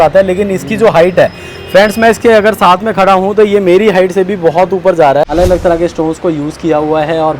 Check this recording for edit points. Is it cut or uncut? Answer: cut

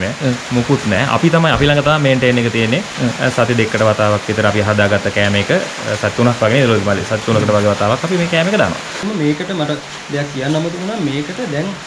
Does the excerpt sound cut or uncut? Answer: cut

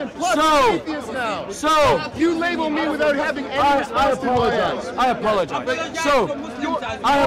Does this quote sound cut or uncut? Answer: uncut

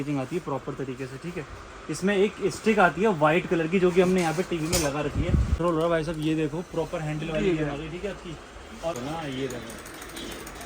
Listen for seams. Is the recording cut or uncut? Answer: cut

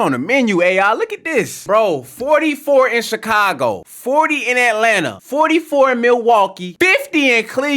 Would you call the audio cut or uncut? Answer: cut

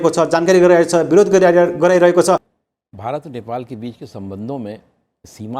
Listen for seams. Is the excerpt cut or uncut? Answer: cut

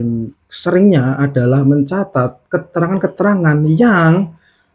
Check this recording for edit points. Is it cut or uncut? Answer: uncut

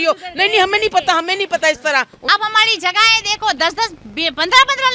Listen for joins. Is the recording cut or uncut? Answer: cut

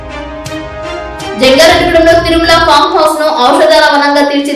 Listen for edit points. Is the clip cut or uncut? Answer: cut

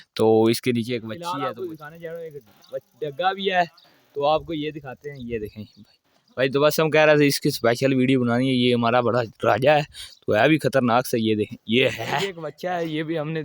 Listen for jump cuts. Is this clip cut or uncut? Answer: cut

